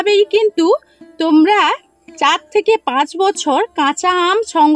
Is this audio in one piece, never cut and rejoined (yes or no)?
yes